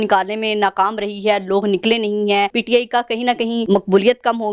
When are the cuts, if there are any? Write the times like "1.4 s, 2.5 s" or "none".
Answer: 2.6 s, 3.6 s

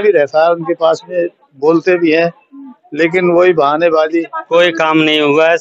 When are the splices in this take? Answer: 4.4 s

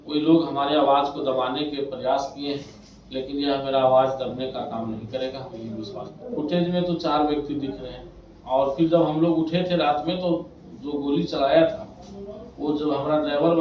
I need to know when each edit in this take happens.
6.2 s

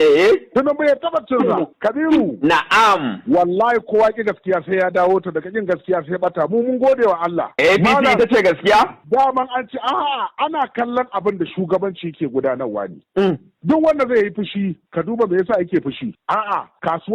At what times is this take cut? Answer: 1.7 s, 9.0 s

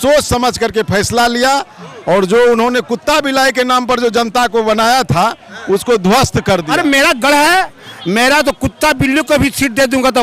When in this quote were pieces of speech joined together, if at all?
6.7 s

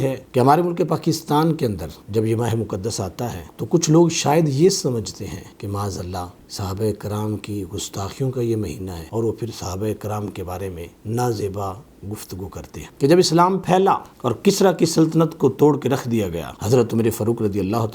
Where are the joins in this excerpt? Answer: 12.8 s

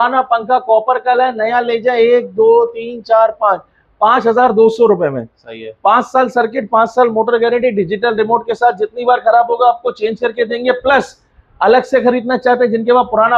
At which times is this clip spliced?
none

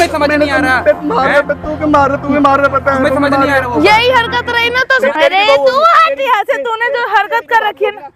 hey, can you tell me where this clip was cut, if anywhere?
5.0 s

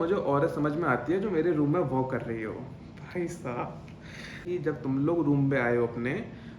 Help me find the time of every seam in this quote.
4.4 s

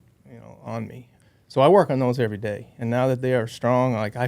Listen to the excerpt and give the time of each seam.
1.1 s

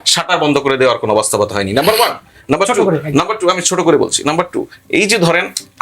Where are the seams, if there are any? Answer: none

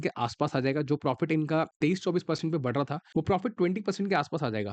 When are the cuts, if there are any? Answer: 1.7 s, 3.0 s

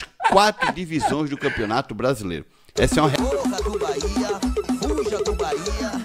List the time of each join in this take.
3.1 s

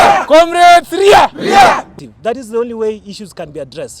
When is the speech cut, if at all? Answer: 1.9 s

